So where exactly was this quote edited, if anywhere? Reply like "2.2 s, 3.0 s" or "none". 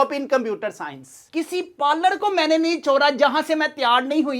1.3 s